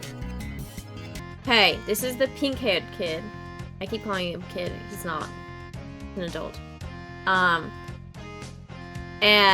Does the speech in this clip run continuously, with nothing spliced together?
no; 1 cut; at 1.2 s

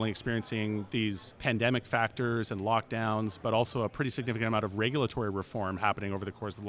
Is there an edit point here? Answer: yes; 2 cuts; at 1.1 s, 3.4 s

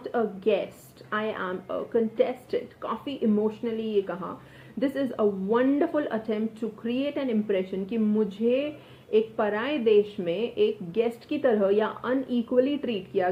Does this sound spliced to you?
no; 0 cuts

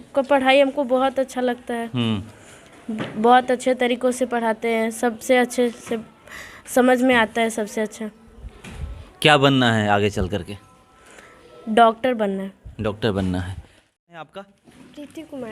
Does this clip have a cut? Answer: yes; 1 cut; at 14.2 s

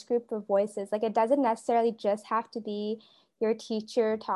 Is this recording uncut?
yes; 0 cuts

